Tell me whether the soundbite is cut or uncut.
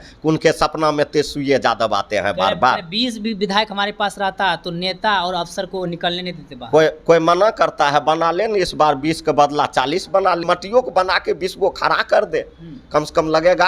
cut